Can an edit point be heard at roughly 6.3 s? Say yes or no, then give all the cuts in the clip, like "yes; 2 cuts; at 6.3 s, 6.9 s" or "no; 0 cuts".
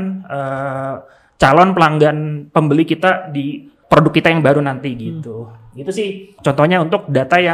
yes; 2 cuts; at 3.7 s, 6.3 s